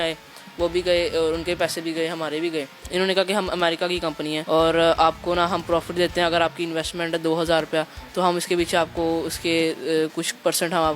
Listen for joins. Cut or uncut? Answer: cut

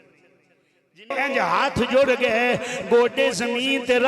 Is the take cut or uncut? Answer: cut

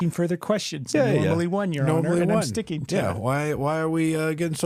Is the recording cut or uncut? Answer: uncut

